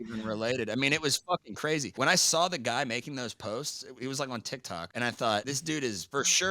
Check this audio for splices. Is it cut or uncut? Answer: cut